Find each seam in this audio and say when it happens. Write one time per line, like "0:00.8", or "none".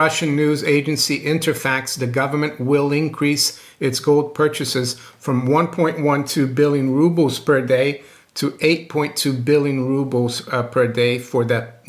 none